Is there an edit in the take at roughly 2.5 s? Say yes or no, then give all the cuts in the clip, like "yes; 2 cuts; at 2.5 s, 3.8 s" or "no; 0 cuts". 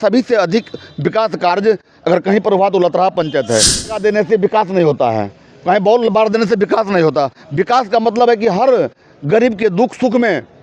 no; 1 cut; at 4.0 s